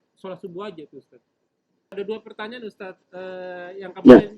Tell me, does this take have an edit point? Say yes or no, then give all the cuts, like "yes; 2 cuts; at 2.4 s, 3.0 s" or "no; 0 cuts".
yes; 1 cut; at 1.9 s